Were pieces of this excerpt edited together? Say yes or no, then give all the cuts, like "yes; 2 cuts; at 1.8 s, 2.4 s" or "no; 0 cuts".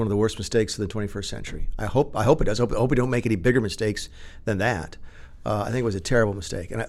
no; 0 cuts